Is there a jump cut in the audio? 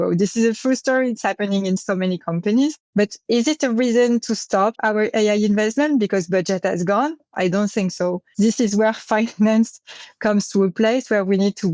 yes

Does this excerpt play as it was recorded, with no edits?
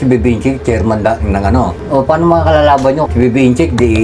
no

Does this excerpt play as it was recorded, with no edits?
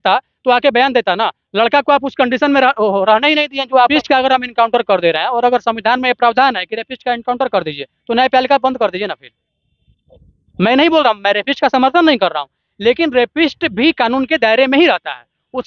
no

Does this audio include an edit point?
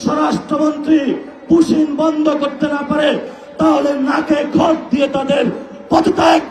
yes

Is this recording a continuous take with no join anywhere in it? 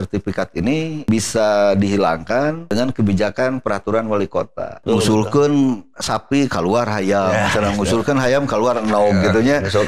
no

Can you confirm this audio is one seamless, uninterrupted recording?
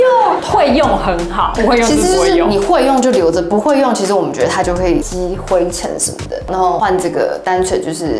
no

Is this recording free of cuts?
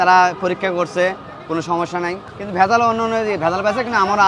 yes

